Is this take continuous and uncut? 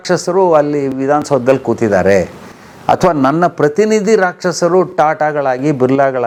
yes; 0 cuts

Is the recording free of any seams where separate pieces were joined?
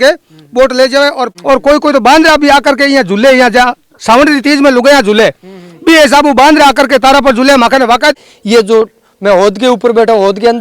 no; 2 cuts; at 1.3 s, 8.2 s

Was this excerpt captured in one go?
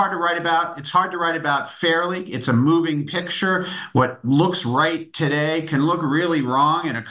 yes; 0 cuts

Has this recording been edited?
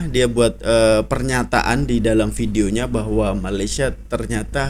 no; 0 cuts

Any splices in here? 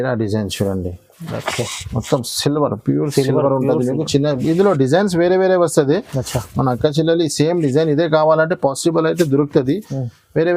no; 0 cuts

